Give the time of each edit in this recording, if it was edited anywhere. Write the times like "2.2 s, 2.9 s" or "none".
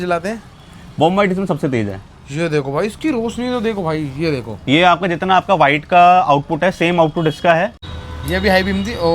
7.8 s